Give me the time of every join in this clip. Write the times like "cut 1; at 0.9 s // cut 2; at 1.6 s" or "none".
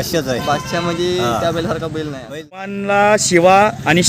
cut 1; at 2.8 s